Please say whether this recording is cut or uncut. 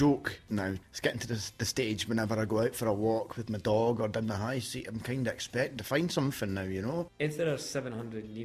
cut